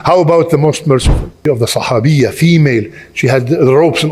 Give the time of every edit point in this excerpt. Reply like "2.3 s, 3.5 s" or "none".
1.4 s